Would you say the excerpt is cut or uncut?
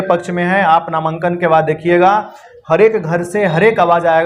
uncut